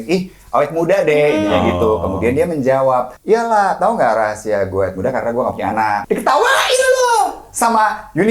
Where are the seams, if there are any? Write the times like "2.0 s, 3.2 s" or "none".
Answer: 3.1 s, 6.0 s